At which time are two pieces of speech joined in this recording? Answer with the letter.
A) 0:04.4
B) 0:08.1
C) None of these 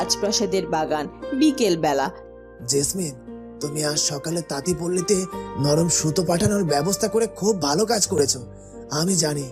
C